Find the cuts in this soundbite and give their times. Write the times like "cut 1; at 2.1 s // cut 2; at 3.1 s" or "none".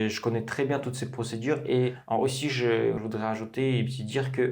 cut 1; at 2.0 s // cut 2; at 3.0 s